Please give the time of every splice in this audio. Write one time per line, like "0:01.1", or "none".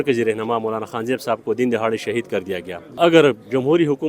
0:02.8

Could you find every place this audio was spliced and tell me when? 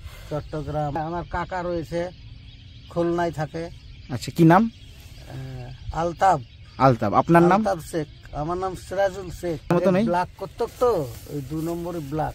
0:01.0
0:09.7

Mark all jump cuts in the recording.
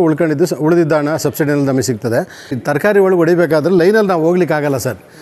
0:02.6

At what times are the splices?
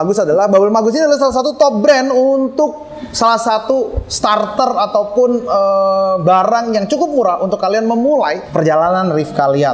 0:08.4

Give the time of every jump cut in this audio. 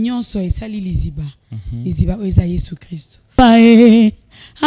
0:03.3

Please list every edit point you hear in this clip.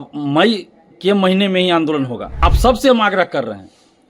0:02.4

